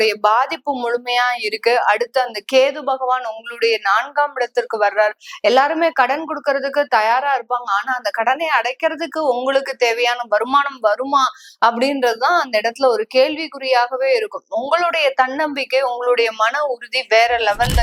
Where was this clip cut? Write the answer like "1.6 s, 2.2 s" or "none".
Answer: none